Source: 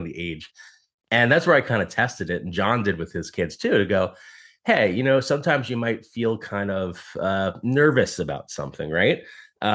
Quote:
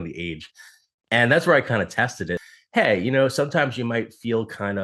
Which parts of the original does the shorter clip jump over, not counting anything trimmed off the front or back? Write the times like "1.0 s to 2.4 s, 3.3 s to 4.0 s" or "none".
2.4 s to 4.3 s